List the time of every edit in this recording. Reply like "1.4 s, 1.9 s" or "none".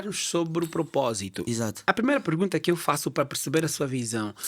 none

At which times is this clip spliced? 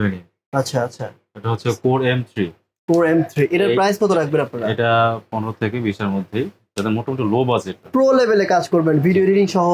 7.8 s

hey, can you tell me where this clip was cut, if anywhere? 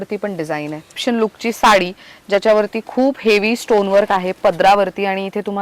1.0 s

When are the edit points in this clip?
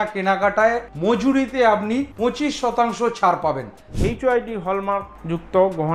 0.9 s, 2.1 s, 3.9 s

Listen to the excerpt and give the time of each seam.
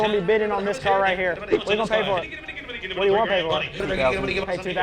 1.5 s, 3.7 s

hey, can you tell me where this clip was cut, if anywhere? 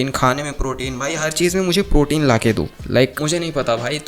none

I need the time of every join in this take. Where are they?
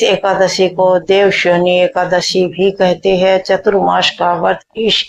none

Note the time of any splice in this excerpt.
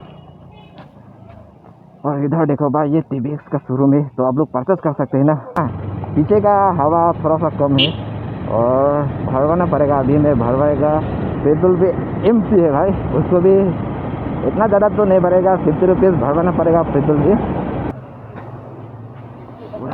5.6 s, 17.9 s

